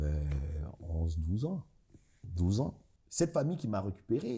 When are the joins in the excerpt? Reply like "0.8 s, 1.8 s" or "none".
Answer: 2.9 s